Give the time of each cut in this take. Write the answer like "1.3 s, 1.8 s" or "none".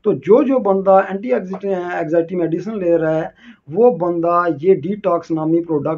none